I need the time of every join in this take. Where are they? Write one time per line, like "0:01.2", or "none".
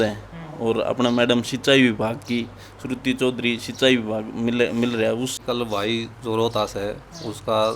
0:05.4